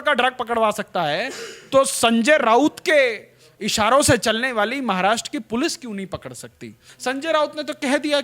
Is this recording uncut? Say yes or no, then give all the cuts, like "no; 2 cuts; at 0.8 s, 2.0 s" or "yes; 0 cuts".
no; 1 cut; at 6.9 s